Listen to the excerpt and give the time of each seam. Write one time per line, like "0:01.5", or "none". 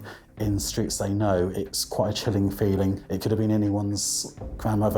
0:01.5
0:03.1